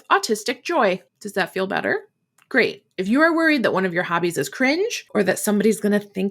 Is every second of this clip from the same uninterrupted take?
no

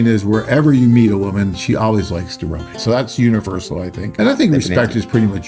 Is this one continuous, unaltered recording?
no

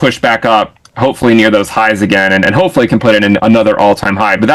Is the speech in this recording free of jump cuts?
yes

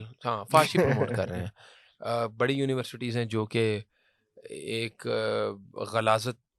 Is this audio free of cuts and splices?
yes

